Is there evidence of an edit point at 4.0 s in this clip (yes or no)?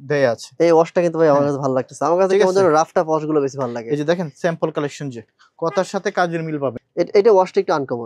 no